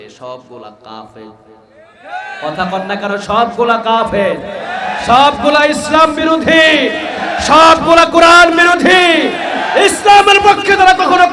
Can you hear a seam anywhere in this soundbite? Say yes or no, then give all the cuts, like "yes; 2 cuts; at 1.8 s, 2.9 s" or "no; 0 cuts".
no; 0 cuts